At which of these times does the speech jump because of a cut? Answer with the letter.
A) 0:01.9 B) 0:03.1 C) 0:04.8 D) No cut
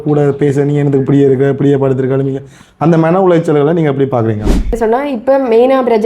C